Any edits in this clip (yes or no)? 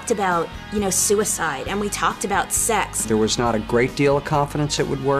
yes